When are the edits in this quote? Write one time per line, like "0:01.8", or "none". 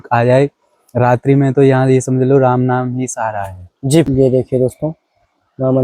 0:04.1